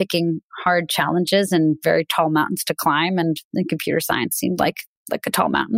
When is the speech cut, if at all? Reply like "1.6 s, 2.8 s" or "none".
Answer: none